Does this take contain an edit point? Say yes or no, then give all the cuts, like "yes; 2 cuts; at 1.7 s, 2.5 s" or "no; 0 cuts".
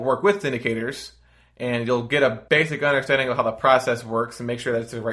yes; 1 cut; at 2.4 s